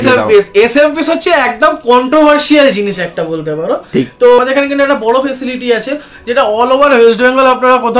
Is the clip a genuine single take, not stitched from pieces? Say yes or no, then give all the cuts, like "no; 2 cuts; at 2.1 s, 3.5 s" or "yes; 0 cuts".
no; 1 cut; at 4.4 s